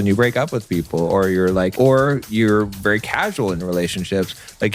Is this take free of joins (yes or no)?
no